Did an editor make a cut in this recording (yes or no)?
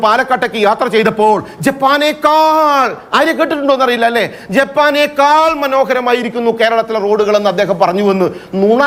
no